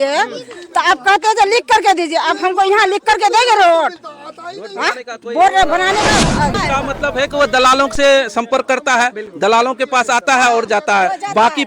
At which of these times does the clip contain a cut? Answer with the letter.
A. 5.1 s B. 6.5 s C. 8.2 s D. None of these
B